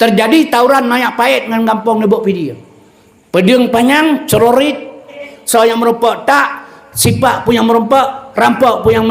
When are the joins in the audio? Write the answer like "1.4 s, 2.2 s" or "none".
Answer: 5.3 s